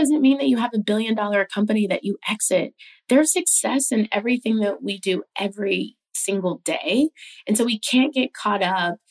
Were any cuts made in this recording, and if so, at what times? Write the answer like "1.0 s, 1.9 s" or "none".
none